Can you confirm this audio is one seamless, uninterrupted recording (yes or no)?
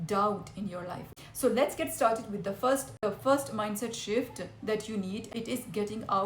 no